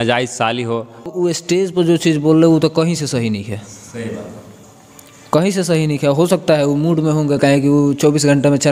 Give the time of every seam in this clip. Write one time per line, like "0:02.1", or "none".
0:01.0